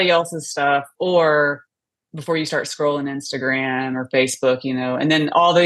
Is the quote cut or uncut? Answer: uncut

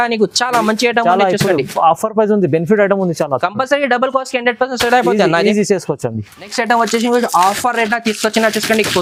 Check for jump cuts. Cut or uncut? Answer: uncut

